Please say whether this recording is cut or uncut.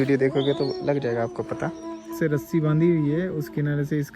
cut